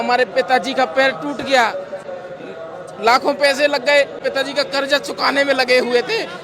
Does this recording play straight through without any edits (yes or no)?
no